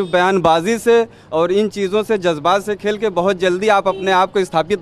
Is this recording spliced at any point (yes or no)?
no